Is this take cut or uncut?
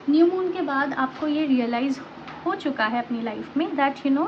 uncut